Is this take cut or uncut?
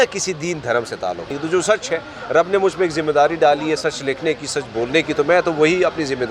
cut